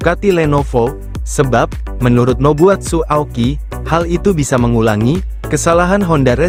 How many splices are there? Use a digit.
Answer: 0